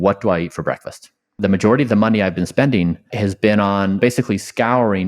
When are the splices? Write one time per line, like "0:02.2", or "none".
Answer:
0:01.3
0:03.1
0:04.0